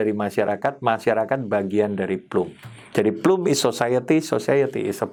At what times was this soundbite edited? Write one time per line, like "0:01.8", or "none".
none